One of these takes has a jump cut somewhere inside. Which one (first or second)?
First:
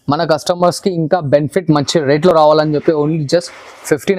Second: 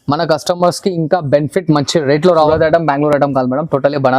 second